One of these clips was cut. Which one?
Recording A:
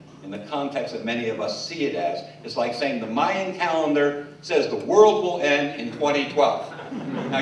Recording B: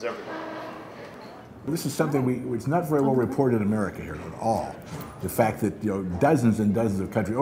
B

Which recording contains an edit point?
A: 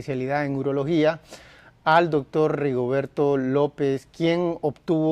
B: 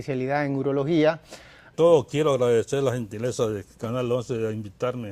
A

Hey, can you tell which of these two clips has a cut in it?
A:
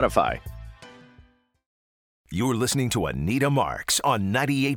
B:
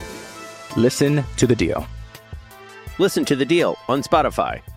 A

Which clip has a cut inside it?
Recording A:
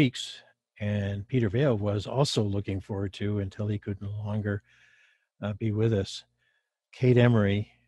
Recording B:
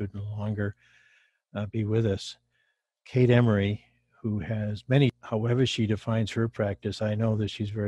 B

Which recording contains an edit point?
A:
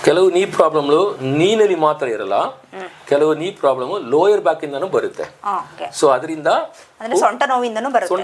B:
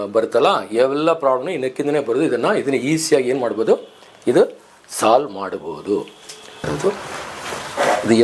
B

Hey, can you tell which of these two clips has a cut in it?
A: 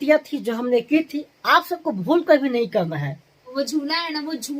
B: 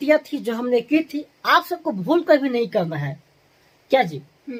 A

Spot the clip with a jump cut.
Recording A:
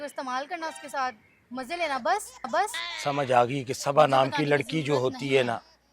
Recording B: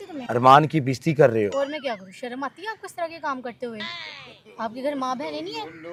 A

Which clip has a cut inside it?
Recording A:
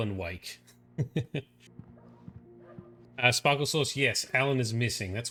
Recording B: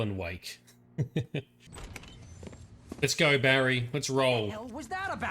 B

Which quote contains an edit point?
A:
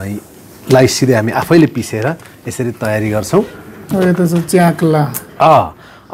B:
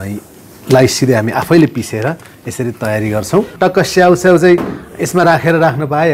B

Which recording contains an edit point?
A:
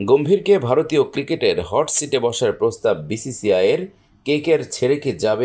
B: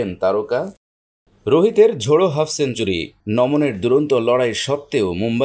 B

